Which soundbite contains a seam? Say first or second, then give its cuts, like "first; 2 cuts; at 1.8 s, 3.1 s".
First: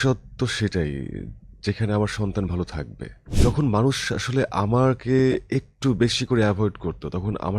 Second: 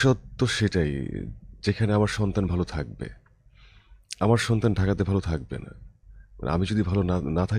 first; 1 cut; at 3.3 s